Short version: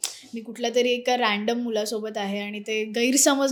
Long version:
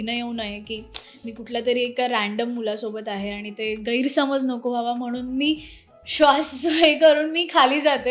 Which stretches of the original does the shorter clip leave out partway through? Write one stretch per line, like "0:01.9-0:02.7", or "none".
none